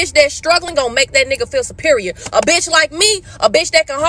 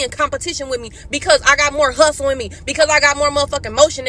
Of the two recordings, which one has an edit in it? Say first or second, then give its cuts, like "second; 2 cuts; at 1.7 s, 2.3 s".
first; 1 cut; at 2.9 s